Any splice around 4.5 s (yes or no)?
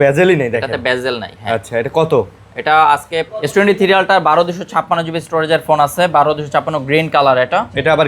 no